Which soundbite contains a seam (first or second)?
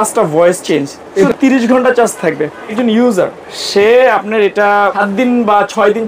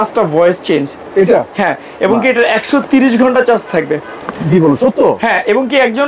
first